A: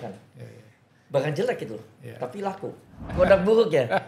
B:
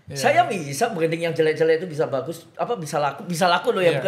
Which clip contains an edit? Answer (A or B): A